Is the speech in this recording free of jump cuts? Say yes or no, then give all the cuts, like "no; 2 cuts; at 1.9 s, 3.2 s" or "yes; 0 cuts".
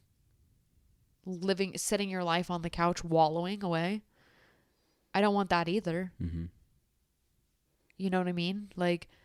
yes; 0 cuts